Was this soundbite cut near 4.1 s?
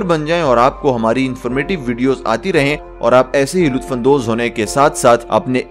no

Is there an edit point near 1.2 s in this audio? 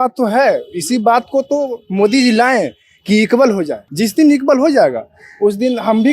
no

